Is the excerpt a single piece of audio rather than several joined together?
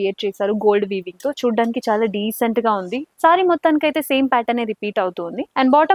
yes; 0 cuts

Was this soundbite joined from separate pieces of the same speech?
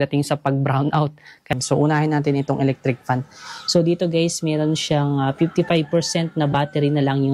yes; 1 cut; at 1.5 s

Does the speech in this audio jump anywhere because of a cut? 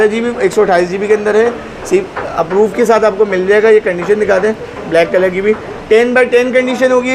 no; 0 cuts

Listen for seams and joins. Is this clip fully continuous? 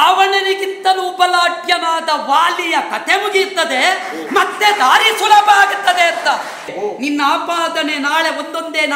no; 1 cut; at 6.7 s

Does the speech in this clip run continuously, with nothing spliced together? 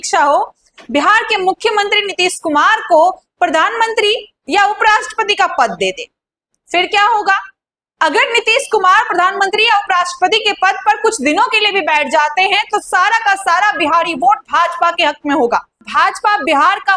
no; 1 cut; at 15.9 s

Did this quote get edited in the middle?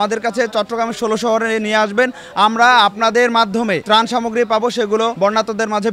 yes; 2 cuts; at 3.8 s, 5.1 s

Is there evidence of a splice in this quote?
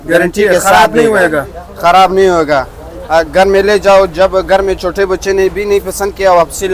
no; 0 cuts

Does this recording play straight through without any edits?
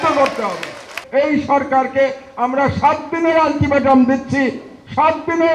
no; 1 cut; at 1.0 s

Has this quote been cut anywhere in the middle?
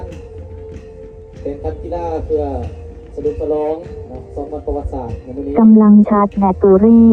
no; 0 cuts

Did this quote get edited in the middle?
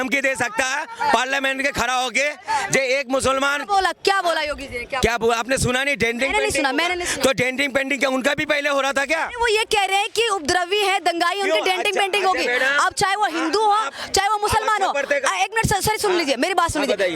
no; 0 cuts

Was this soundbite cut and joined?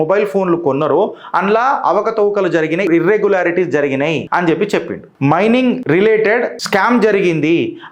yes; 5 cuts; at 2.9 s, 4.2 s, 5.0 s, 5.8 s, 6.6 s

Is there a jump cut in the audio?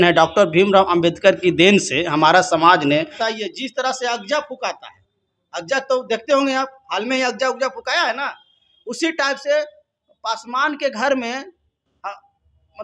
yes; 1 cut; at 3.2 s

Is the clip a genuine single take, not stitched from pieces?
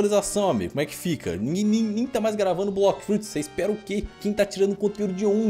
yes; 0 cuts

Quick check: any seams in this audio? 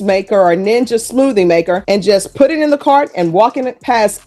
no; 0 cuts

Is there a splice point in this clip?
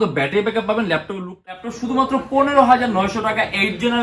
yes; 1 cut; at 1.7 s

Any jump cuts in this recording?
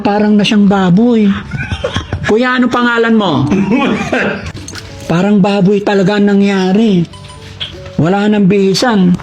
yes; 1 cut; at 4.5 s

